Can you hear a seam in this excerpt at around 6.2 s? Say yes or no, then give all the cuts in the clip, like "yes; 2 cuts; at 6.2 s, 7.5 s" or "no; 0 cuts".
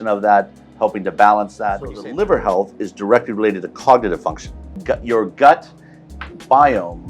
no; 2 cuts; at 2.0 s, 4.8 s